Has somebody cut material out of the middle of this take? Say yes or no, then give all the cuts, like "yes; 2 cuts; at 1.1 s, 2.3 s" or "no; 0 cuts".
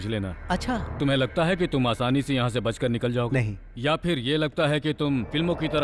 yes; 1 cut; at 1.0 s